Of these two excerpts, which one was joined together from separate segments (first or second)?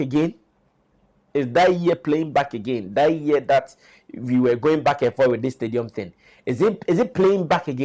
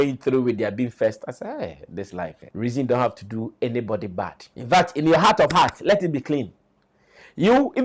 second